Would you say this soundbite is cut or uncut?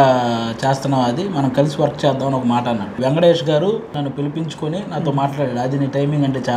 cut